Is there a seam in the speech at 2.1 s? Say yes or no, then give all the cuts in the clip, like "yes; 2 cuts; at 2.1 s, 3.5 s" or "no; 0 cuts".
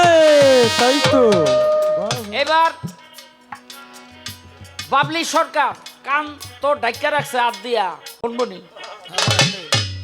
yes; 1 cut; at 2.1 s